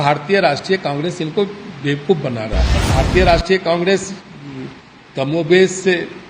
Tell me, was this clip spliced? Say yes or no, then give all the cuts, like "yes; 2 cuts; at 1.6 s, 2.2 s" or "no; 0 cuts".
yes; 1 cut; at 2.9 s